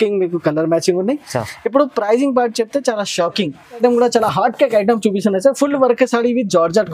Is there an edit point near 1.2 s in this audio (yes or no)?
no